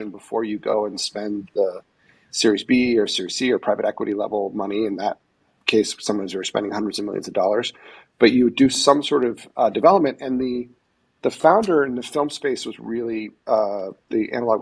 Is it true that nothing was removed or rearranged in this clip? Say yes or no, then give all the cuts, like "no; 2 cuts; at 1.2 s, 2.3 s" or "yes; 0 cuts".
yes; 0 cuts